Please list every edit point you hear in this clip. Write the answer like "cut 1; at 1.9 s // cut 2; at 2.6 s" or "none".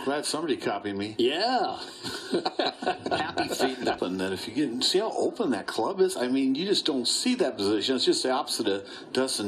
cut 1; at 5.1 s